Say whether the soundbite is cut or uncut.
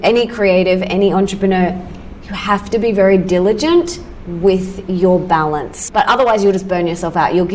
cut